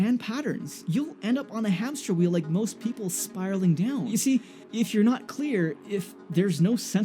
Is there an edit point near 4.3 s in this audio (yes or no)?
yes